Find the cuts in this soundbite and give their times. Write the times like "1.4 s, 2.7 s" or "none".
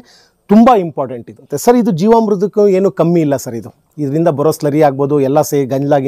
1.5 s